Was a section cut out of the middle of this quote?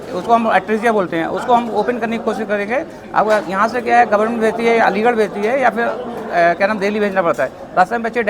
no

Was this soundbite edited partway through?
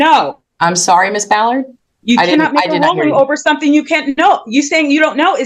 no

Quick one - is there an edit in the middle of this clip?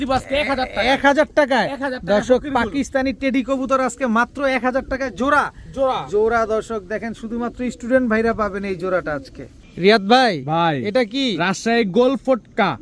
no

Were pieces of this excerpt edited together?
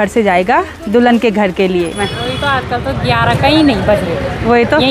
yes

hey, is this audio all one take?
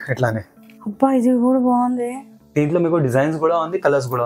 no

